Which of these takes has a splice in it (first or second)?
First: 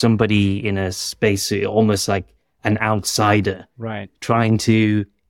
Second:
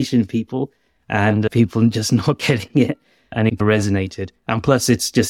second